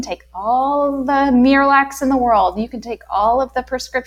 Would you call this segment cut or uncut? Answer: uncut